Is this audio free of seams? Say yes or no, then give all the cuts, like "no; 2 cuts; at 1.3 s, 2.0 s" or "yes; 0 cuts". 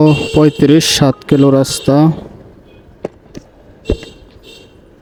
yes; 0 cuts